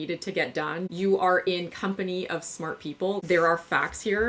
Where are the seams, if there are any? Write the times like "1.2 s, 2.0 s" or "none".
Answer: 3.2 s